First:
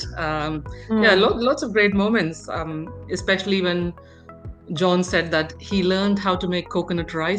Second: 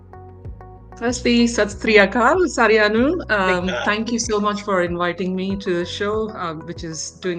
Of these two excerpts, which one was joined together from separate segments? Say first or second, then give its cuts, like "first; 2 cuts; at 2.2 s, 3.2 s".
second; 1 cut; at 1.0 s